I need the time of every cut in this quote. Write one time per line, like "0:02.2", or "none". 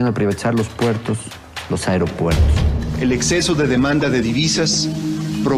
0:02.8